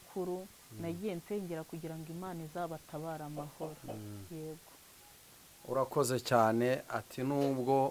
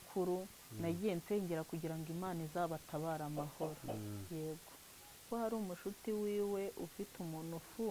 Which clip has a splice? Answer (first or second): second